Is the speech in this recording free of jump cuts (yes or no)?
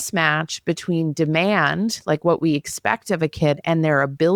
yes